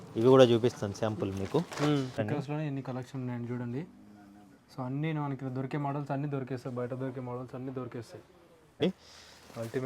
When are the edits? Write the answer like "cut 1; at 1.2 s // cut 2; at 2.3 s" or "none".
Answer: cut 1; at 2.2 s // cut 2; at 8.8 s